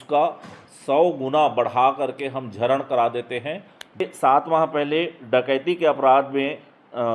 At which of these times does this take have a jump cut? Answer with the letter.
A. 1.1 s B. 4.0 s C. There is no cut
B